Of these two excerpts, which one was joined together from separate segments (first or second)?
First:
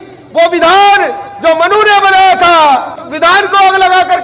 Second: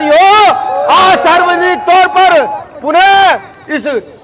first